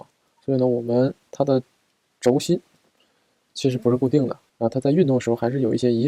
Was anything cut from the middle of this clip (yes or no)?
no